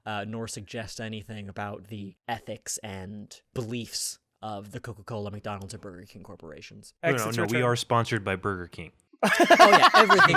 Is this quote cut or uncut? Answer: cut